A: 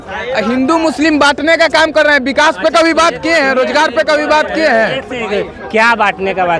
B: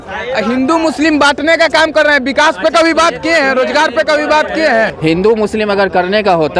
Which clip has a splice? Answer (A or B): B